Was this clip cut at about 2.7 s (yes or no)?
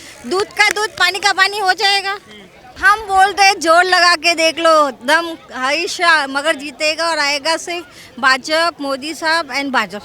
yes